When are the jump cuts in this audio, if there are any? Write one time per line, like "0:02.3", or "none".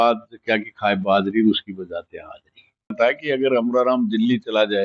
0:02.9